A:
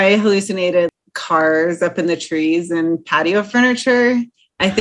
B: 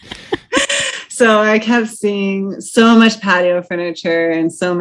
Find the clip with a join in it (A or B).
A